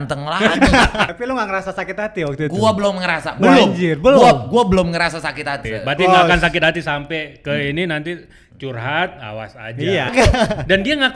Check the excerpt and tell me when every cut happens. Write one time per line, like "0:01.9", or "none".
0:01.1
0:05.7
0:10.1